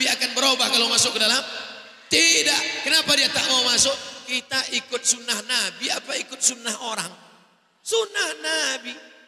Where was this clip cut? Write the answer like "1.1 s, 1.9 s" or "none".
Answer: none